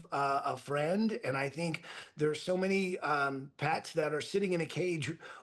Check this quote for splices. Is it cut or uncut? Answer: uncut